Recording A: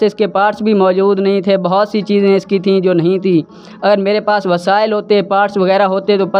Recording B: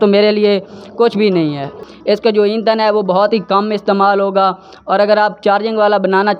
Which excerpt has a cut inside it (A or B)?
B